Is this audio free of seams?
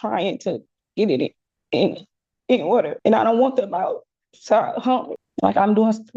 no; 2 cuts; at 2.9 s, 5.2 s

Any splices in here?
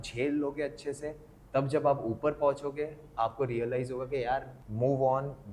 yes; 1 cut; at 4.6 s

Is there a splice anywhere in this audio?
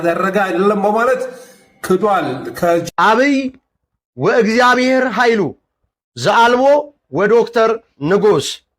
yes; 1 cut; at 2.8 s

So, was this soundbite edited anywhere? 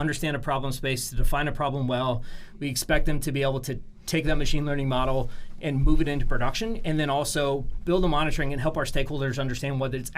no; 0 cuts

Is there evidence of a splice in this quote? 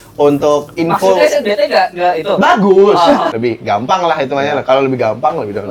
yes; 1 cut; at 3.3 s

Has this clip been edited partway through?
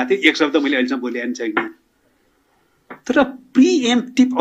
no; 0 cuts

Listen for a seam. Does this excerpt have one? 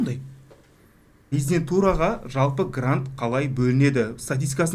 yes; 1 cut; at 1.3 s

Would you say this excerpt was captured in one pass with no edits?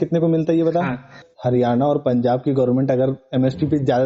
no; 1 cut; at 1.2 s

